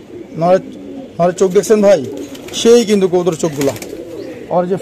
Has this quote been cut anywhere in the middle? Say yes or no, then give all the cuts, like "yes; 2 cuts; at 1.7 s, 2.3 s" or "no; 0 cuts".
no; 0 cuts